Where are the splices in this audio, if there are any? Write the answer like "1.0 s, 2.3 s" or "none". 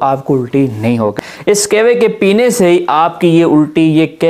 1.2 s